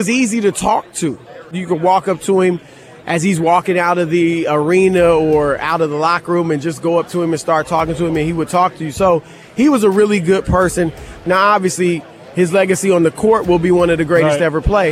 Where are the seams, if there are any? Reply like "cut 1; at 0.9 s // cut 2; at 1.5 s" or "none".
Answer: cut 1; at 1.5 s // cut 2; at 11.2 s